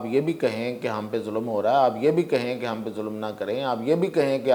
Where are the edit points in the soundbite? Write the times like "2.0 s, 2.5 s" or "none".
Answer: none